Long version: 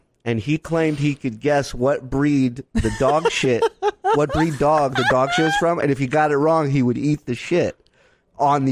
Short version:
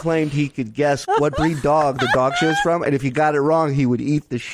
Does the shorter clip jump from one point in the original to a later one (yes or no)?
yes